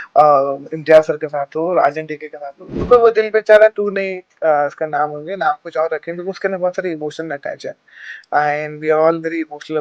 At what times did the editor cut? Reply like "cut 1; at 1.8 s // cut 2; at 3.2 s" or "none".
cut 1; at 2.8 s